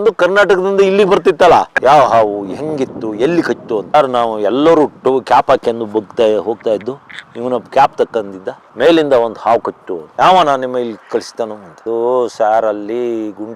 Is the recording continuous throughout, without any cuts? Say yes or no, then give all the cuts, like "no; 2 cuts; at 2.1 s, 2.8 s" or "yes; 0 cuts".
no; 2 cuts; at 1.7 s, 10.0 s